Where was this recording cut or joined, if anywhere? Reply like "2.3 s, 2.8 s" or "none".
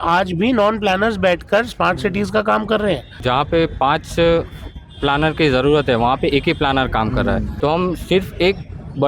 3.2 s, 7.5 s